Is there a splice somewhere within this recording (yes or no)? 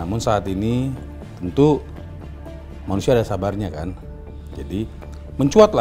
no